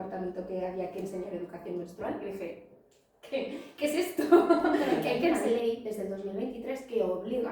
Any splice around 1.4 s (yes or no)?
no